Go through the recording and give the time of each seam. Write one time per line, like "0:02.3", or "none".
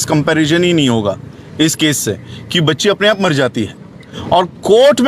0:04.1